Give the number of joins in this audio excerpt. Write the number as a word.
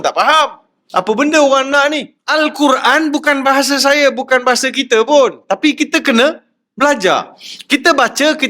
one